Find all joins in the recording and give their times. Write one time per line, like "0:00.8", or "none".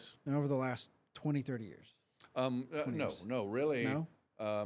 none